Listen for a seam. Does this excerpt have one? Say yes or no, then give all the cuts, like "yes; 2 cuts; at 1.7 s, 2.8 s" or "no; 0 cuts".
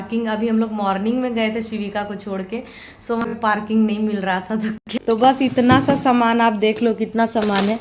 yes; 2 cuts; at 3.2 s, 4.7 s